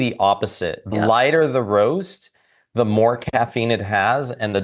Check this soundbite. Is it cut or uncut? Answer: cut